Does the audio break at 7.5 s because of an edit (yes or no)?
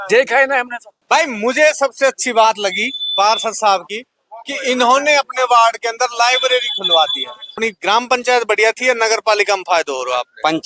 yes